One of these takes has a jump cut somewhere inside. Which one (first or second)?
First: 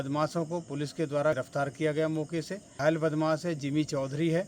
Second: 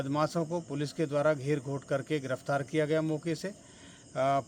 first